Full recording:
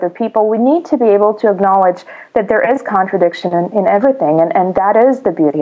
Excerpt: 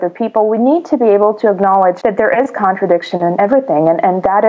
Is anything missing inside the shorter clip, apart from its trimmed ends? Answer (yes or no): yes